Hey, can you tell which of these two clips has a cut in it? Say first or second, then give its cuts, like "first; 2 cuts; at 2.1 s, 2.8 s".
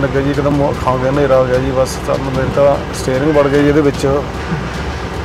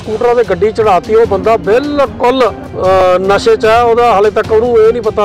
second; 1 cut; at 2.7 s